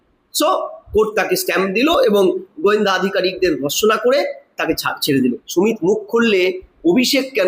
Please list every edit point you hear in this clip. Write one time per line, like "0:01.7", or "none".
0:05.4